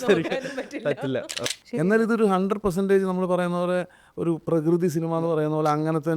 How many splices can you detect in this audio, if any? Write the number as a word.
one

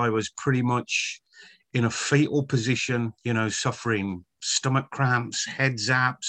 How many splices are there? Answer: one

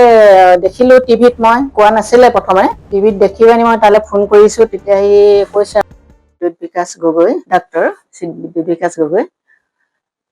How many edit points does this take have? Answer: three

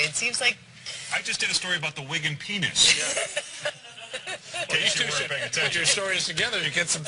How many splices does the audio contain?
one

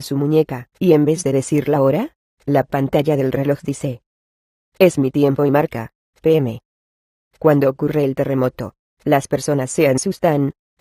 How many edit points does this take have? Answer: one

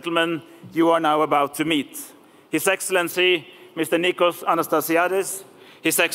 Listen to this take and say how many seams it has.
one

